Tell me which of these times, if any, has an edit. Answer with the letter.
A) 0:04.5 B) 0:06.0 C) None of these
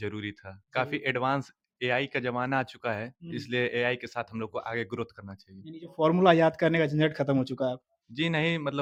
C